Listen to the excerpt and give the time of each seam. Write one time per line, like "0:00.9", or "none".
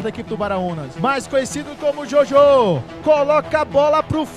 0:00.9
0:02.9